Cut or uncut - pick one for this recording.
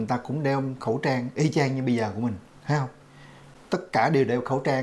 cut